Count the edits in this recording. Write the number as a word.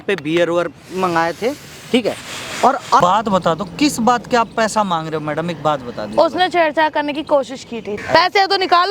two